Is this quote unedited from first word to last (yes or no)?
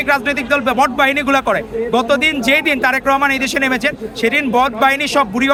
yes